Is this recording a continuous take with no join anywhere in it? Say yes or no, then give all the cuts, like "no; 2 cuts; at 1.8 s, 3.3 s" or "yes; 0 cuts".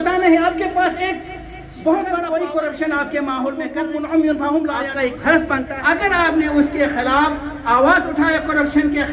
no; 4 cuts; at 2.2 s, 3.7 s, 4.8 s, 5.7 s